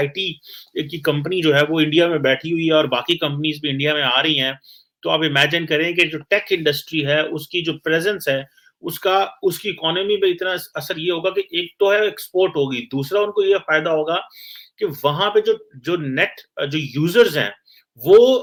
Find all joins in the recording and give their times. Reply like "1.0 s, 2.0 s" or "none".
none